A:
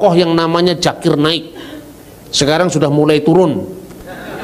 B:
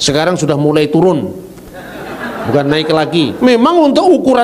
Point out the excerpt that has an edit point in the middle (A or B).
B